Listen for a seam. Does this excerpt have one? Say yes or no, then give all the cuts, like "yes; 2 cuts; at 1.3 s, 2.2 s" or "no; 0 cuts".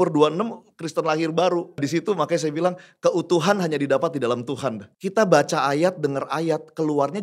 yes; 2 cuts; at 1.8 s, 4.9 s